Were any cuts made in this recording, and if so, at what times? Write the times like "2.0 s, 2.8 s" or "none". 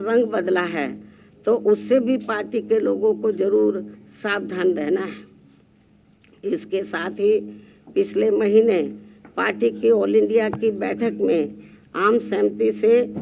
none